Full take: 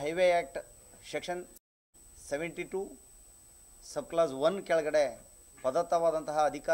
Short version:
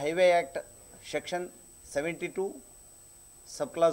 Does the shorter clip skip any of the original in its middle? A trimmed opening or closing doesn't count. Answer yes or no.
yes